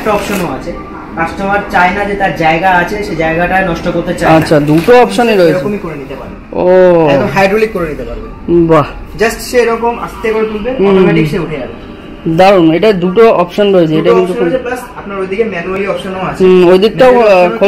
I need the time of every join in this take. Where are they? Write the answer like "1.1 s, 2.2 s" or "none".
none